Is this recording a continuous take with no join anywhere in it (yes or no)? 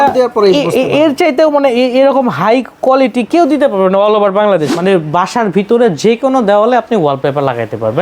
no